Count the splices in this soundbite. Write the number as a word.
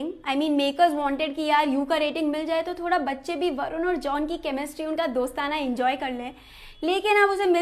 zero